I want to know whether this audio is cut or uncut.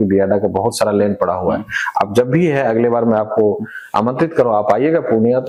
uncut